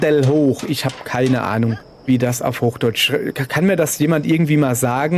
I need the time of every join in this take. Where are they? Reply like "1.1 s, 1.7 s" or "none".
1.9 s